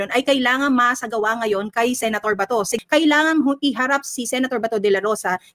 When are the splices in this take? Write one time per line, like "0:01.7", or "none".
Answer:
0:02.7